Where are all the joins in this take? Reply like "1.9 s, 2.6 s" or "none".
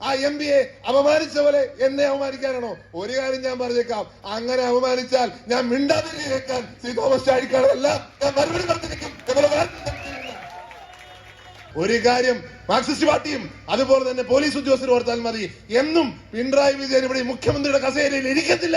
11.7 s